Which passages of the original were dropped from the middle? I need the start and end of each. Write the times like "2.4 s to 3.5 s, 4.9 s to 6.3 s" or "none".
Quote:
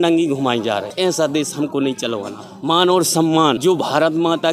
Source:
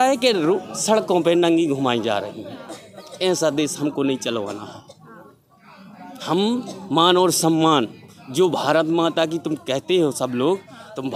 2.3 s to 3.1 s, 4.7 s to 6.8 s, 7.9 s to 8.3 s